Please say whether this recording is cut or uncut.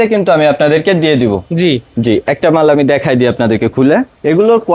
uncut